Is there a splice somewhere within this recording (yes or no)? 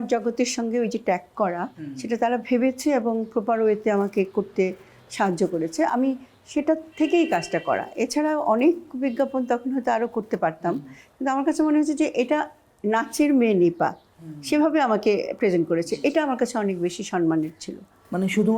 no